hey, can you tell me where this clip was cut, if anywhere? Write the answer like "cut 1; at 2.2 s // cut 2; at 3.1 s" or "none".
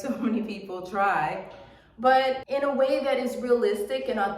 cut 1; at 2.4 s